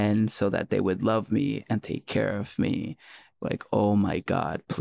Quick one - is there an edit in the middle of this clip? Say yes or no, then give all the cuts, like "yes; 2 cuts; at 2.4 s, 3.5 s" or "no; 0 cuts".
yes; 1 cut; at 3.4 s